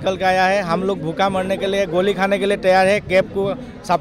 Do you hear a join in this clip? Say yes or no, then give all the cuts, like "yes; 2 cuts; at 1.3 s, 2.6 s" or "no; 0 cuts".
no; 0 cuts